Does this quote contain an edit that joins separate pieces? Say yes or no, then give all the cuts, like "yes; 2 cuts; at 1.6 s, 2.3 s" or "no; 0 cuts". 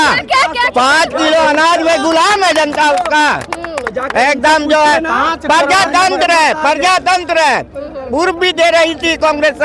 no; 0 cuts